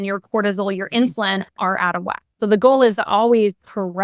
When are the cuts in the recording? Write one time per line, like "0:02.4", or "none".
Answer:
0:02.3